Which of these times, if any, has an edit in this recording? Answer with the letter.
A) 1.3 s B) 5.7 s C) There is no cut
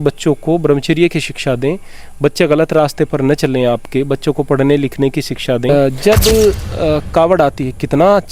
B